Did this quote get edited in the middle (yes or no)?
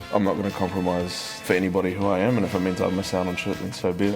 yes